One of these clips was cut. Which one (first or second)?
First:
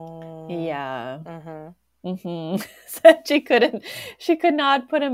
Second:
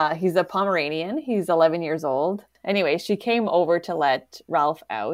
second